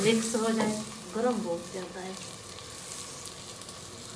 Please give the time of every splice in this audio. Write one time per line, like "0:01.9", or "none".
none